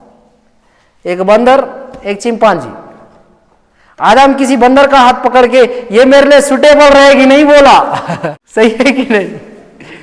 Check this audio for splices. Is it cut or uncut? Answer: cut